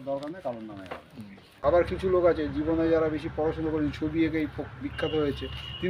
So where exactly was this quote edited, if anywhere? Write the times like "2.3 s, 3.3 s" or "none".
1.5 s